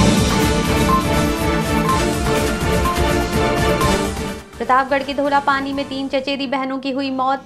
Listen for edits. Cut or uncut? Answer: uncut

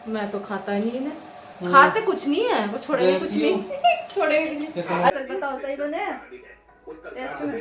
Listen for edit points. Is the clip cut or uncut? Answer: cut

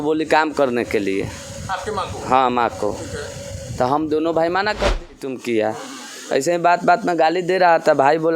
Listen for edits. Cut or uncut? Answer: cut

